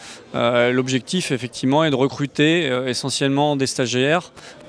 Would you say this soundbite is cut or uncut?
uncut